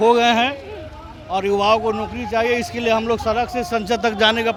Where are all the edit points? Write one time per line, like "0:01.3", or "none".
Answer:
none